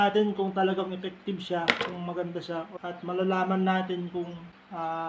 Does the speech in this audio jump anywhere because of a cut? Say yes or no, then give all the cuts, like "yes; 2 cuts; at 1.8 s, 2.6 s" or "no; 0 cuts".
yes; 1 cut; at 2.7 s